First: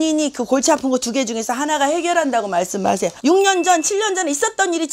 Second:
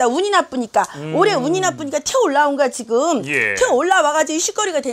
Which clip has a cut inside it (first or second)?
first